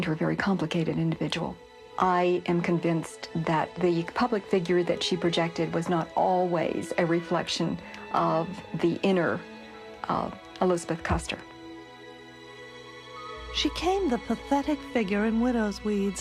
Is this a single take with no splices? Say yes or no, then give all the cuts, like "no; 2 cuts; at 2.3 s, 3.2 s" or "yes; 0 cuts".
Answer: yes; 0 cuts